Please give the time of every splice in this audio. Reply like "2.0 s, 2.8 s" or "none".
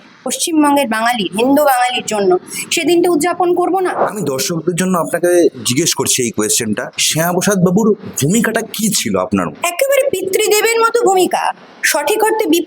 4.0 s